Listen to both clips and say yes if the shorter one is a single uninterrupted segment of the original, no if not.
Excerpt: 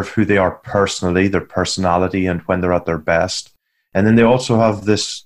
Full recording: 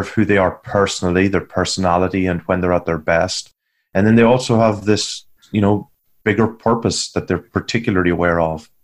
yes